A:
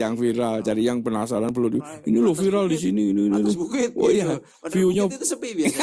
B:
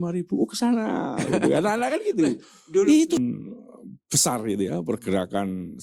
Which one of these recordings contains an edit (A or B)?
B